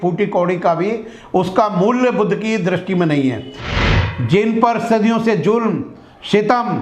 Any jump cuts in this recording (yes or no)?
yes